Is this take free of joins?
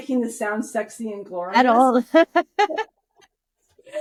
yes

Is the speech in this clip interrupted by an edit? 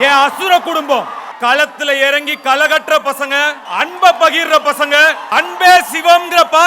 yes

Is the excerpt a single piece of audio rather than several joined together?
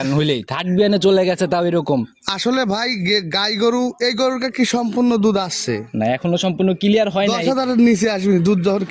yes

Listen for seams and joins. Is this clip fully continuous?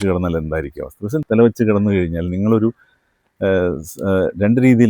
no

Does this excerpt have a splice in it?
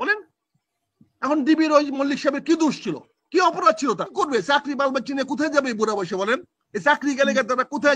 yes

